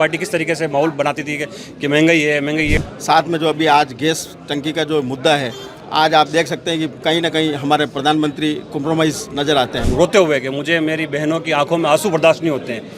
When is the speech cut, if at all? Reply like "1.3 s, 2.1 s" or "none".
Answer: 2.8 s, 9.8 s